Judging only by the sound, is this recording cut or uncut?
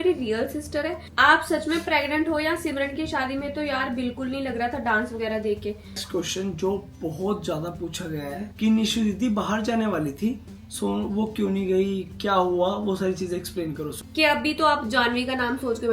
cut